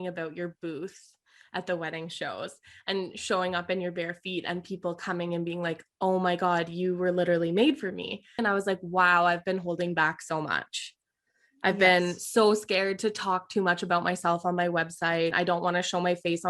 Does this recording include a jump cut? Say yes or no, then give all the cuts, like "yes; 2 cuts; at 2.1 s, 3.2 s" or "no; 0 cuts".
yes; 2 cuts; at 8.4 s, 15.3 s